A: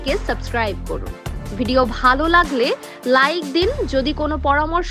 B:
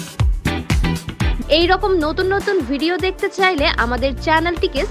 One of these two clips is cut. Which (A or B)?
B